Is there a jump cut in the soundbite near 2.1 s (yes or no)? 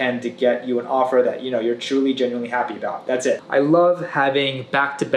no